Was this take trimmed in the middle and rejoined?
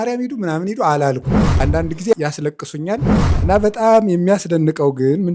no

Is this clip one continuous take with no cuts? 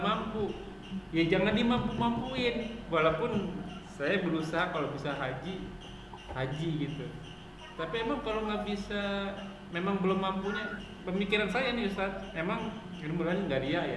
yes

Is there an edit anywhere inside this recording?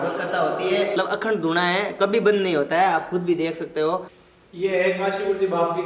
yes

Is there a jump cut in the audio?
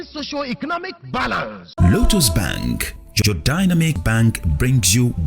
yes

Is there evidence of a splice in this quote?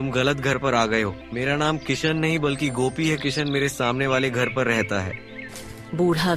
yes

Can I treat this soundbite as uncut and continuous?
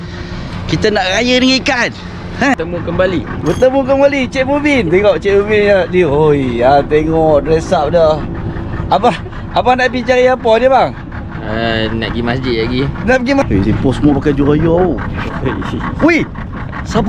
no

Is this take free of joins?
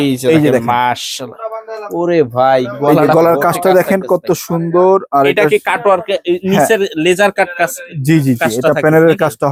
yes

